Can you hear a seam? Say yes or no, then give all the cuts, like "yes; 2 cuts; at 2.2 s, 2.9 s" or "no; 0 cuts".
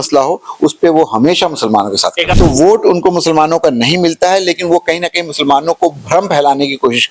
yes; 1 cut; at 2.3 s